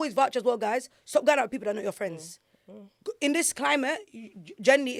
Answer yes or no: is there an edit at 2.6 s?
no